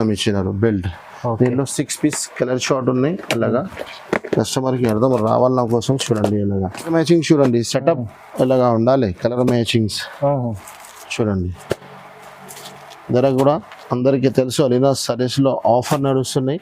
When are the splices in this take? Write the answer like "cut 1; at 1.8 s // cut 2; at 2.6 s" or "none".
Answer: cut 1; at 6.9 s